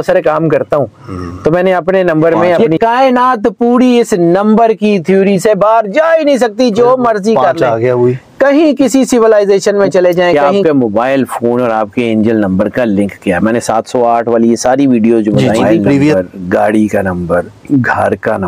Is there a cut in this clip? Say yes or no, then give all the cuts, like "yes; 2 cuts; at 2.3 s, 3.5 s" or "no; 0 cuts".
yes; 3 cuts; at 2.6 s, 10.5 s, 16.1 s